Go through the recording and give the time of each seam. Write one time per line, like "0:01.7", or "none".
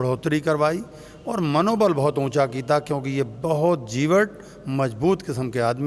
none